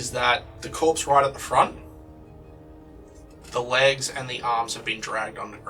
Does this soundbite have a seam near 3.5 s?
no; 0 cuts

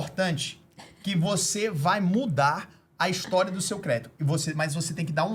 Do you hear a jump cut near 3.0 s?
no; 0 cuts

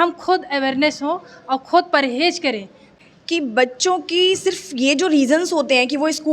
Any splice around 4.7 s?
no; 1 cut; at 2.9 s

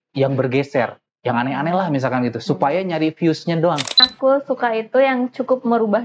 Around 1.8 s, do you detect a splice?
no; 1 cut; at 4.1 s

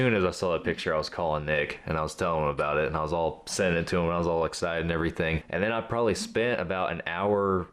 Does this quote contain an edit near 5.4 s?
yes; 1 cut; at 5.4 s

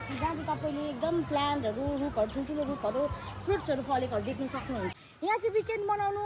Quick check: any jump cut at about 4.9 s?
yes; 1 cut; at 4.9 s

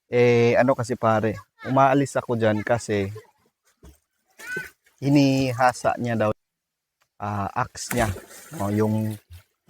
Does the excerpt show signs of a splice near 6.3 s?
yes; 1 cut; at 6.3 s

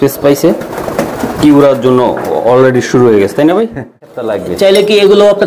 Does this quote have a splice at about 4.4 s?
yes; 1 cut; at 4.4 s

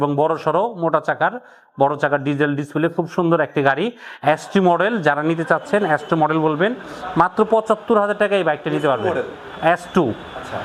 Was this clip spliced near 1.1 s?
no; 0 cuts

